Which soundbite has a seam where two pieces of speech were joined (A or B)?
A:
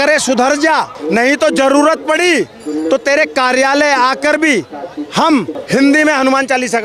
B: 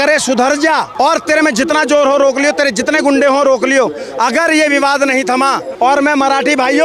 B